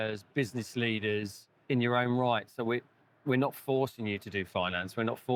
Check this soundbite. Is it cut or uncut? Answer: uncut